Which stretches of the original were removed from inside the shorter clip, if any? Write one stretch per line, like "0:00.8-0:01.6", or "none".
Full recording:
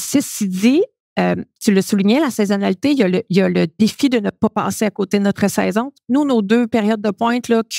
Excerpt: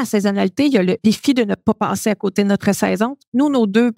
0:03.2-0:03.7